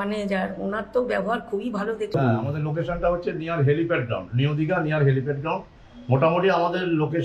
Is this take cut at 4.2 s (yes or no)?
no